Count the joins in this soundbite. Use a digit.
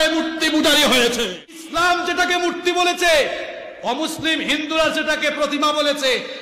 1